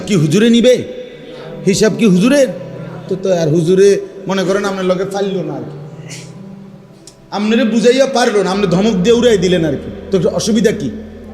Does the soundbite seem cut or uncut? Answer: uncut